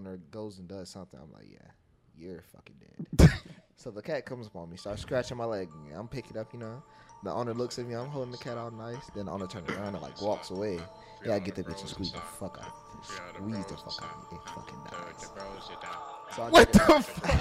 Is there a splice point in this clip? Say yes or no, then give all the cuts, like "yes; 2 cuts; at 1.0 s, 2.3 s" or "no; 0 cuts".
no; 0 cuts